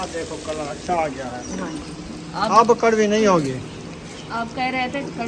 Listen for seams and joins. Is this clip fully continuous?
yes; 0 cuts

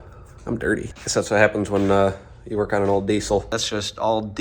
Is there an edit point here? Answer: yes; 2 cuts; at 1.0 s, 3.5 s

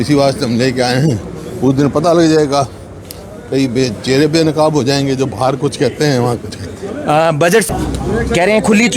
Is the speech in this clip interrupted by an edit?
yes; 1 cut; at 7.7 s

